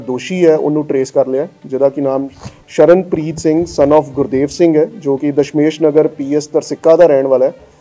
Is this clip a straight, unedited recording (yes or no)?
yes